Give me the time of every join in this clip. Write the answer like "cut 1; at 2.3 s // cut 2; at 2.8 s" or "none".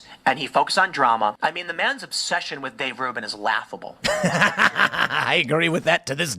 cut 1; at 1.4 s